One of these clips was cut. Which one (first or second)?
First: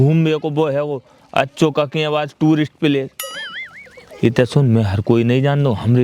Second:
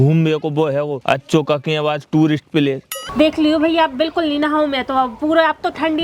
second